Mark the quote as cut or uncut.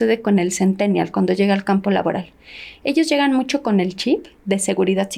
uncut